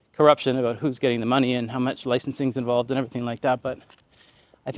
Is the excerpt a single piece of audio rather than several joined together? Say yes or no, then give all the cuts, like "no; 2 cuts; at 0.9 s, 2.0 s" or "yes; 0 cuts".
yes; 0 cuts